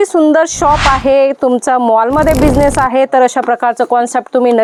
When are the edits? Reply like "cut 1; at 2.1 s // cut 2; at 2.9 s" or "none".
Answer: none